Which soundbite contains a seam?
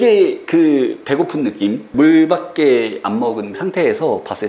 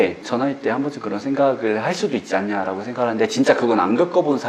first; 2 cuts; at 1.9 s, 3.6 s

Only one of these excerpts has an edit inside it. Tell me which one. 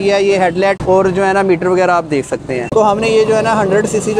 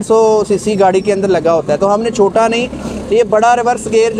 first; 1 cut; at 2.7 s

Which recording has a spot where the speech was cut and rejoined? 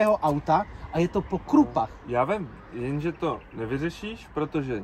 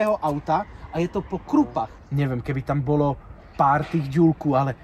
second; 1 cut; at 2.0 s

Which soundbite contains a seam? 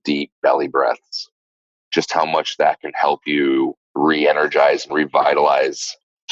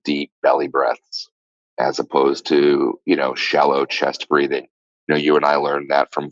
first; 2 cuts; at 1.6 s, 3.8 s

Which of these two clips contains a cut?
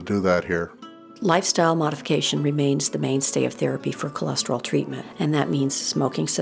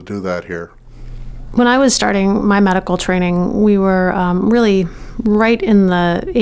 first; 2 cuts; at 1.2 s, 5.0 s

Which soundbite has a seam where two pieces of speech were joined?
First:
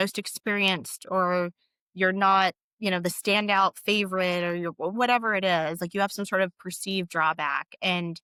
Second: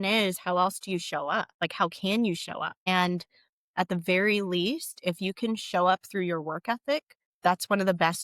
second; 3 cuts; at 1.5 s, 2.7 s, 7.2 s

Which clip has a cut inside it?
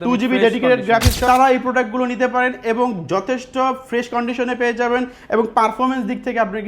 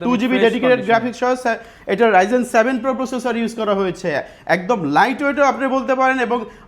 first; 1 cut; at 1.2 s

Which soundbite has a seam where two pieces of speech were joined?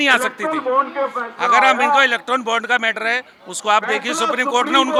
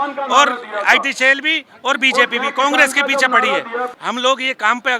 second; 1 cut; at 3.9 s

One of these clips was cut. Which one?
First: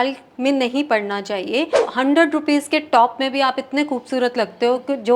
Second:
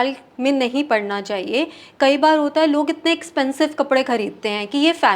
first; 1 cut; at 1.8 s

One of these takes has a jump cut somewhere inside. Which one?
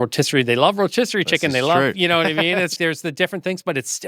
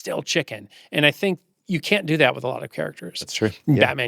first; 1 cut; at 2.8 s

